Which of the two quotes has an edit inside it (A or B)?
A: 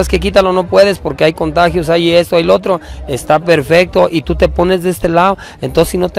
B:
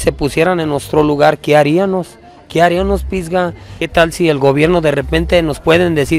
B